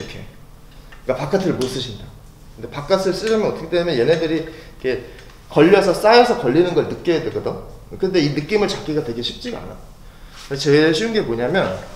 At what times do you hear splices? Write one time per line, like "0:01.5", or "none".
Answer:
none

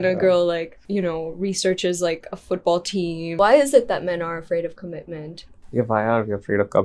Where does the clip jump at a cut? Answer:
0:03.4

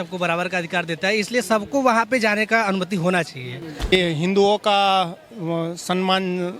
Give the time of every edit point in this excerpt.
0:03.9

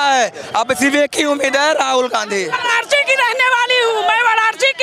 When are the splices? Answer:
0:02.6

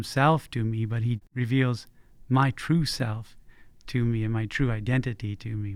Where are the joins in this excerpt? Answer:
0:01.2

